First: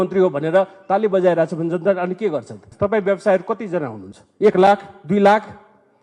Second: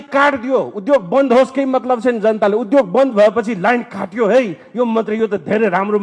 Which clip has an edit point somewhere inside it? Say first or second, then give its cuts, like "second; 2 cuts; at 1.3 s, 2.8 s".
first; 1 cut; at 2.6 s